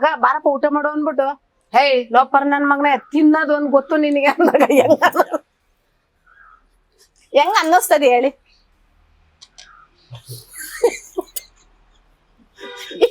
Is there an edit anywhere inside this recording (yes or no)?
no